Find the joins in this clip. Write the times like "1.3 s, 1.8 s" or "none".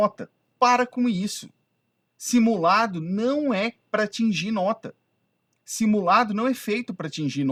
none